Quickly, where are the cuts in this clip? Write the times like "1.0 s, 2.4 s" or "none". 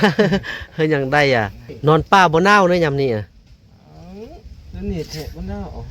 1.6 s